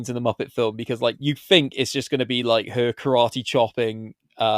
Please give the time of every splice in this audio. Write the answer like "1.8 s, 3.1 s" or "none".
1.2 s